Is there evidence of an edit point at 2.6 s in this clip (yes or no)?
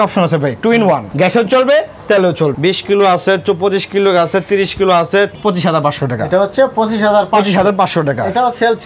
yes